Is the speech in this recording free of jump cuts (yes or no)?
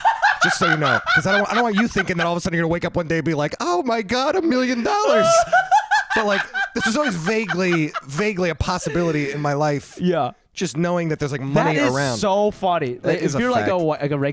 yes